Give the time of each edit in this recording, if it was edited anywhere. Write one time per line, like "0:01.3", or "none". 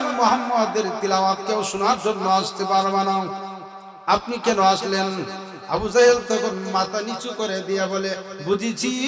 none